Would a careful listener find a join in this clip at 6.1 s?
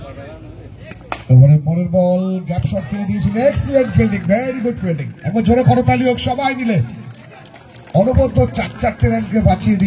no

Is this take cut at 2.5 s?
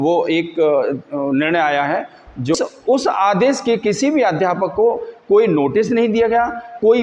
yes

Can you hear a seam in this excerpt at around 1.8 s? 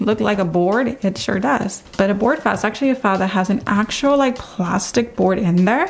yes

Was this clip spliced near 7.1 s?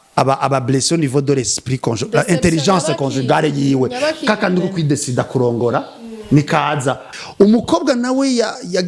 yes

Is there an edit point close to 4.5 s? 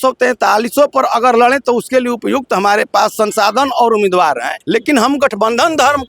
yes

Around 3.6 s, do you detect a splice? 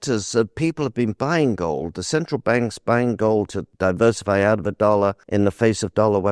yes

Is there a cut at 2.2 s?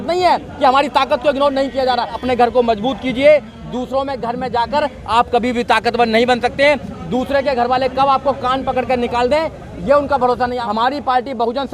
yes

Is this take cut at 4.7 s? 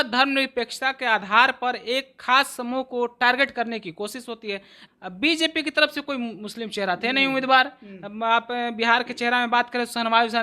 yes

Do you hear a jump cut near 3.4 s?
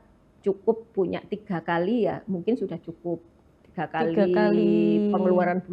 no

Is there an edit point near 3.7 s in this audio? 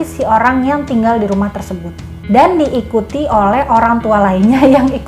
no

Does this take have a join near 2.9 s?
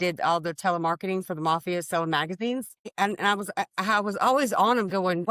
yes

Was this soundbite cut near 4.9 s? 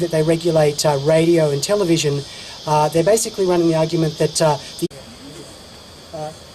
no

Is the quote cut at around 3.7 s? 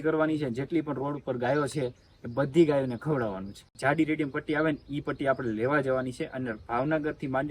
yes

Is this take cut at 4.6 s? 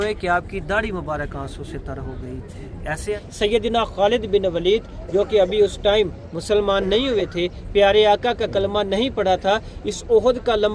no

